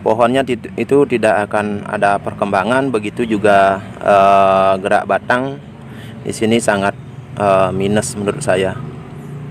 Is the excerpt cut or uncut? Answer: uncut